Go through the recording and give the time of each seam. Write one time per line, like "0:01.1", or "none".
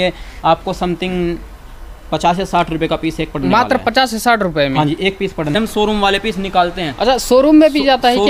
0:05.5